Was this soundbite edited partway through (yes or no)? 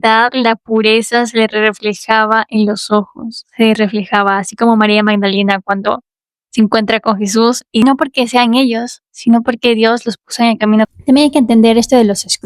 yes